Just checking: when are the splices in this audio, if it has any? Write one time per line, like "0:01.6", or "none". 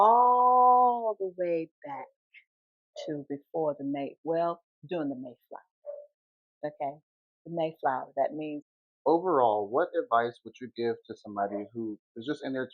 0:08.7